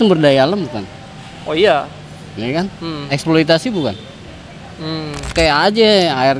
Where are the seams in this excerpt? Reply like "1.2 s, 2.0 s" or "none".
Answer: 5.3 s

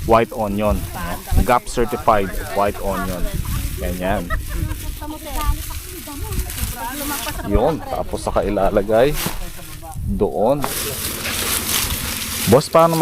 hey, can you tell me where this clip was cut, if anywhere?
10.7 s

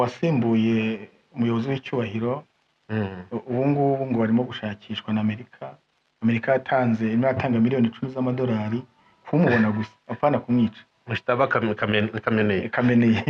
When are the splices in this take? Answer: none

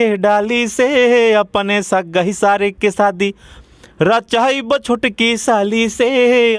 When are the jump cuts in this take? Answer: none

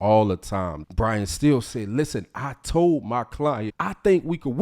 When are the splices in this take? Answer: 3.6 s

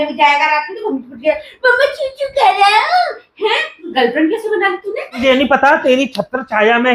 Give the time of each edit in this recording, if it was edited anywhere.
3.8 s, 5.2 s

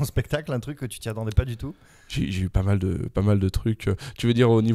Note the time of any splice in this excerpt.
none

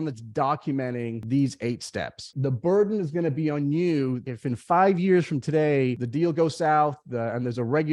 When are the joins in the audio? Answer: 1.2 s, 2.3 s, 4.2 s, 6.0 s

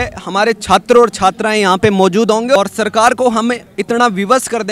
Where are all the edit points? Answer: 2.5 s

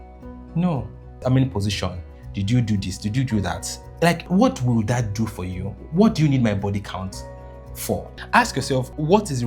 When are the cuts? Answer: 1.2 s, 4.3 s, 8.4 s

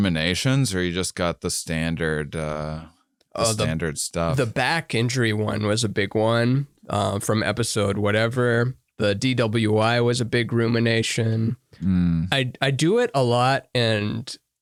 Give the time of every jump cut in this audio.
none

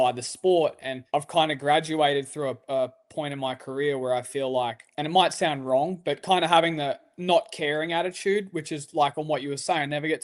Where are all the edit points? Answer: 0.9 s, 4.8 s

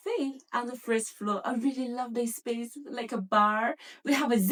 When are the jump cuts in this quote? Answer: none

